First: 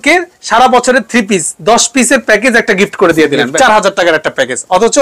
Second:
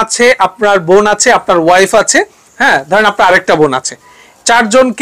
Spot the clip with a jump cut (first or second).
first